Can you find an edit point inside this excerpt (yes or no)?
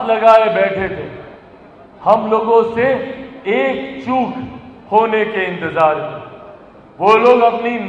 no